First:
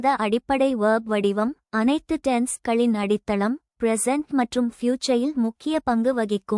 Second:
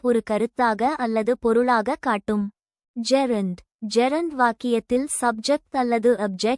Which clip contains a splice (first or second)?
second